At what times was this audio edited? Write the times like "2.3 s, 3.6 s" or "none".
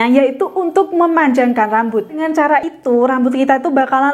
2.5 s